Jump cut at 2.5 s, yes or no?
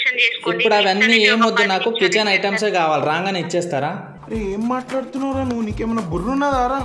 no